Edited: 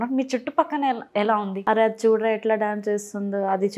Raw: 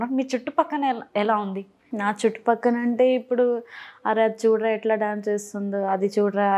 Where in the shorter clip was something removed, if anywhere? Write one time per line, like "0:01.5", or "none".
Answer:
0:01.5